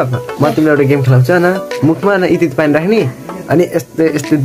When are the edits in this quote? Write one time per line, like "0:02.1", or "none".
0:01.7